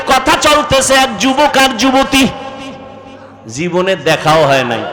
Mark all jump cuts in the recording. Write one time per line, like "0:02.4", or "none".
none